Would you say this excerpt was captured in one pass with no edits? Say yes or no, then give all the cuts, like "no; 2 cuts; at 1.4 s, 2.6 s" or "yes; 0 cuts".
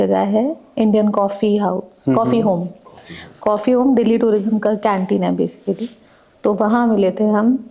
yes; 0 cuts